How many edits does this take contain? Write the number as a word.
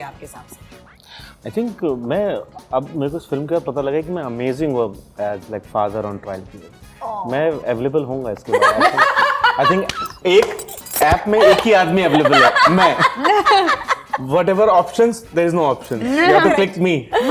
zero